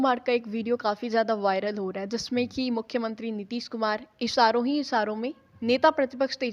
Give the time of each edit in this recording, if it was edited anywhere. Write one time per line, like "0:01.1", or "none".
none